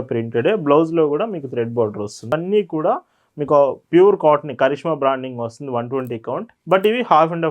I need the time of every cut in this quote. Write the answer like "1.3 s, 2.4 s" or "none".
2.3 s